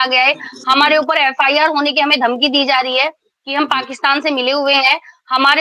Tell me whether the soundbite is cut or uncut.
uncut